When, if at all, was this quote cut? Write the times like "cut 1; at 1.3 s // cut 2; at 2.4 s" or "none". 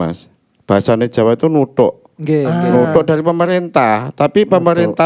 none